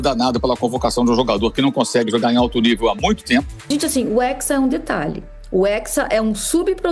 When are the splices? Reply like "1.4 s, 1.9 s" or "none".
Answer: 3.6 s